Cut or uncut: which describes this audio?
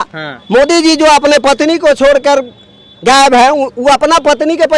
uncut